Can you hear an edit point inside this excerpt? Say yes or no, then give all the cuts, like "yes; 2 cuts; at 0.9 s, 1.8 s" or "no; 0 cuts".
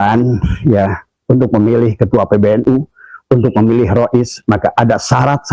no; 0 cuts